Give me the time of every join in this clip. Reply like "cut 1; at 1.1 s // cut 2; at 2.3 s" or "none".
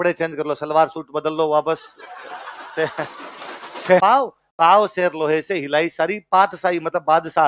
cut 1; at 4.0 s